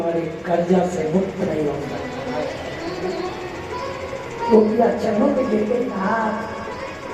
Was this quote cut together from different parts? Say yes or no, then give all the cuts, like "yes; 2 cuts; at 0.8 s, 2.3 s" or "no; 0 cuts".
yes; 1 cut; at 5.9 s